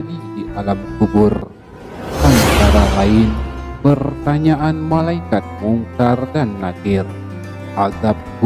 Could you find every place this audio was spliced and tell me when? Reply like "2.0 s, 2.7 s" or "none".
none

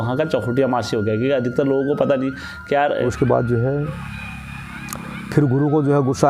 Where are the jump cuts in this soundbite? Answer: 3.1 s

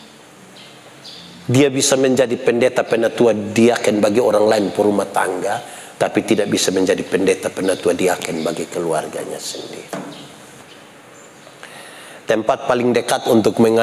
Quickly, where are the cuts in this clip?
10.6 s

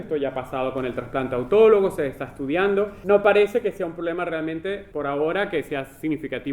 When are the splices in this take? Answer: 3.0 s, 4.9 s

